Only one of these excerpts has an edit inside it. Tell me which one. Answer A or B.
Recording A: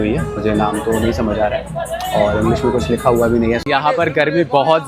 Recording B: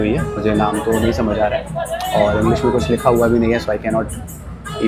A